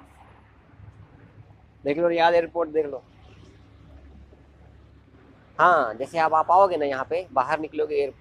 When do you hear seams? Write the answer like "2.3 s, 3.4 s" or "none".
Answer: none